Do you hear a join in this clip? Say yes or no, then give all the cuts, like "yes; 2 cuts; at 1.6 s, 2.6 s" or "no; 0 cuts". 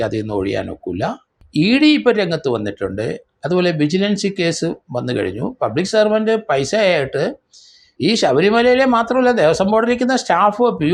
yes; 1 cut; at 1.4 s